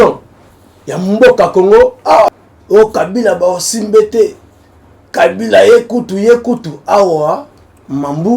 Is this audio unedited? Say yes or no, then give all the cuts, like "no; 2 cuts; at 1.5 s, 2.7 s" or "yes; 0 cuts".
no; 1 cut; at 2.3 s